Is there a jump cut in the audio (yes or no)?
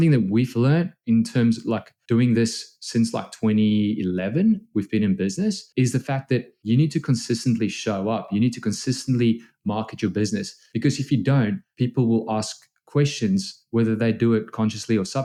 no